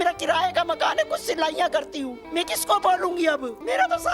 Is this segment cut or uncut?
uncut